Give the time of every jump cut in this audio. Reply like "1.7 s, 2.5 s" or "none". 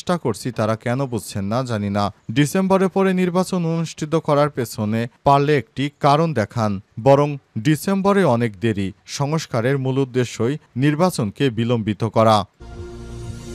12.6 s

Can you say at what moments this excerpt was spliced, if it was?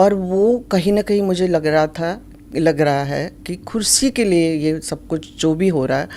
none

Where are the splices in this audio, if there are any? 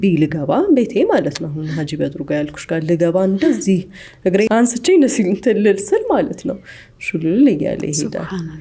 4.5 s

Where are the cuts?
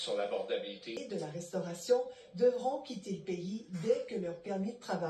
1.0 s

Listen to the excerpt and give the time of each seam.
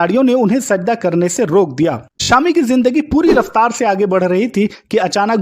2.1 s

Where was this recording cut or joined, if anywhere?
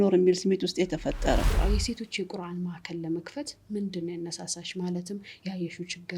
1.5 s

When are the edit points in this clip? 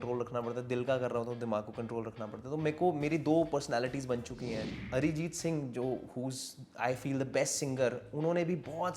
4.6 s

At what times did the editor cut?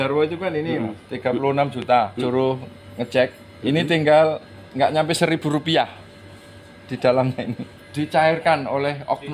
2.2 s, 7.8 s

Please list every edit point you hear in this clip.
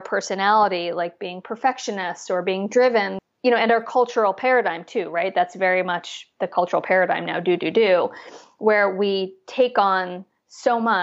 3.1 s

